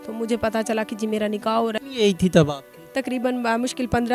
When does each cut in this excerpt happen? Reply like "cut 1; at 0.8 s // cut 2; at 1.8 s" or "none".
cut 1; at 1.8 s